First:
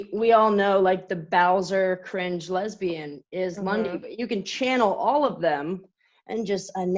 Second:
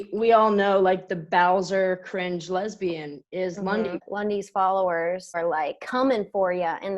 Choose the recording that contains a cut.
second; 2 cuts; at 4.1 s, 5.4 s

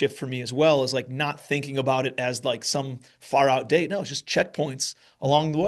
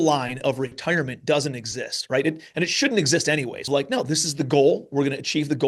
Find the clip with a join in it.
second; 1 cut; at 3.6 s

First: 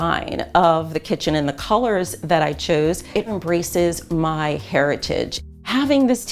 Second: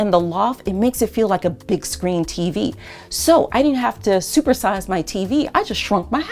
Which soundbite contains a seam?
first; 2 cuts; at 3.2 s, 5.4 s

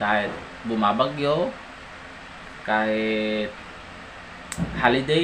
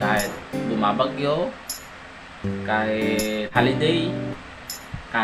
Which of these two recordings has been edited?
second; 1 cut; at 3.5 s

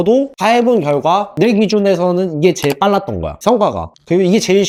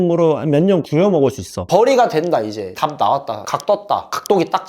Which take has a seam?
second; 2 cuts; at 1.5 s, 2.6 s

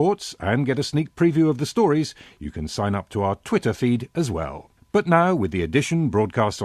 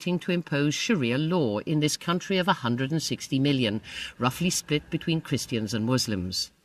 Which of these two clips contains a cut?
second; 1 cut; at 2.8 s

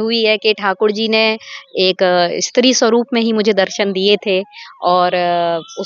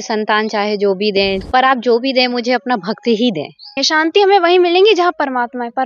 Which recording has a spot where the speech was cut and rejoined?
second; 2 cuts; at 1.4 s, 3.8 s

